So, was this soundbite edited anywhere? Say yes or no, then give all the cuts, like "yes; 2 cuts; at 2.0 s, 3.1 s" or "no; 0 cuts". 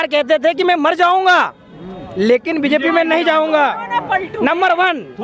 no; 0 cuts